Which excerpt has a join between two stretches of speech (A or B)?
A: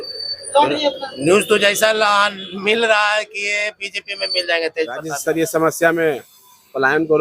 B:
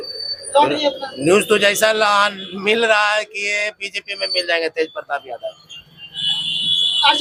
A